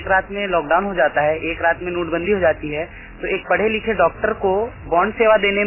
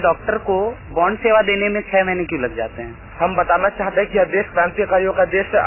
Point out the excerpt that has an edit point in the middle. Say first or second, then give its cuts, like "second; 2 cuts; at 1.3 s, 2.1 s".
second; 1 cut; at 3.0 s